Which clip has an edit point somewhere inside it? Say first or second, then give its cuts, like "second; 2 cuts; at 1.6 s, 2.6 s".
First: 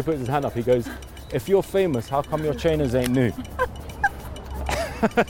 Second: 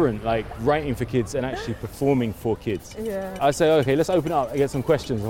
second; 1 cut; at 3.4 s